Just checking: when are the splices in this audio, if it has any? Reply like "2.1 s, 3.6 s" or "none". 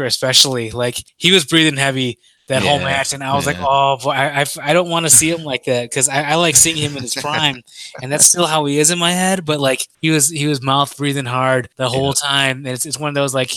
1.1 s, 9.9 s, 11.7 s